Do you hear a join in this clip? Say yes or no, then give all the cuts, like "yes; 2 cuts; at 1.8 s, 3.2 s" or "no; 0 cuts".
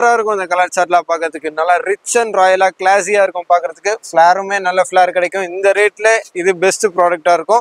no; 0 cuts